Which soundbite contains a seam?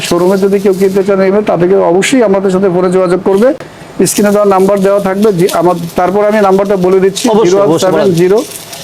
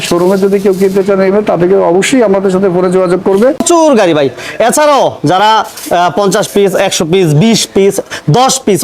second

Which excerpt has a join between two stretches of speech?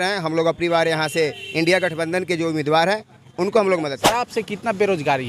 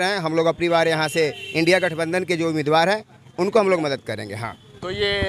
first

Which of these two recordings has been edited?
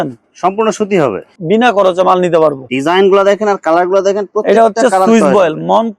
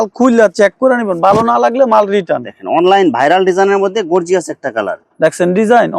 first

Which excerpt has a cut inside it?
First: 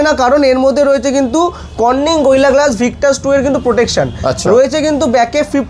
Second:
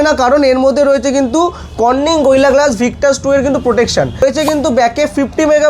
second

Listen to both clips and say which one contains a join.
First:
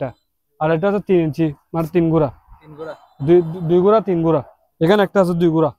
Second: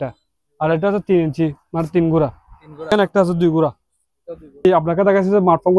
second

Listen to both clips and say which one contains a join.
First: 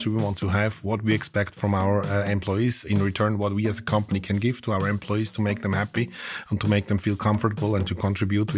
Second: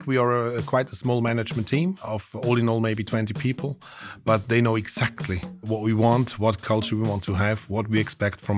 second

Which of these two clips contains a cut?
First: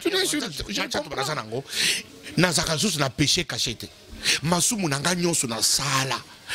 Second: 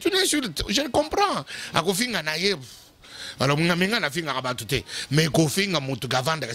first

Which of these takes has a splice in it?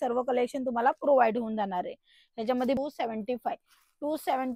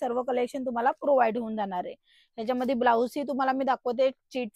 first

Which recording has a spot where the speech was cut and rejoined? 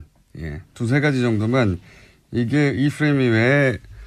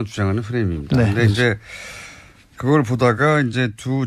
second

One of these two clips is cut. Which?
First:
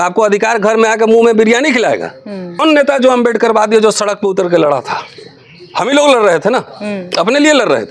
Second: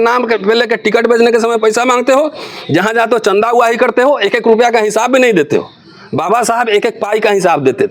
first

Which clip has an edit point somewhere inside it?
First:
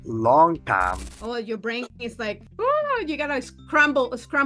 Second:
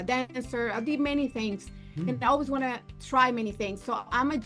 first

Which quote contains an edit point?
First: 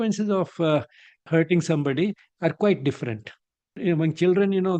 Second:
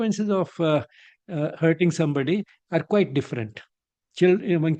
first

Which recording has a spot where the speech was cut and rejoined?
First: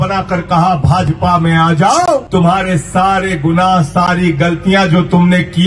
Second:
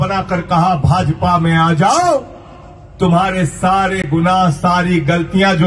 first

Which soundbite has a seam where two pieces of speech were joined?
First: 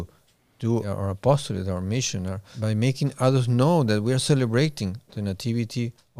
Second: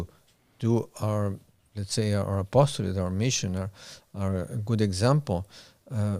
first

